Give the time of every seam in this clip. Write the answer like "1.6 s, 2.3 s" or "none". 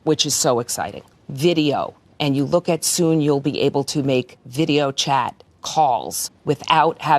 1.1 s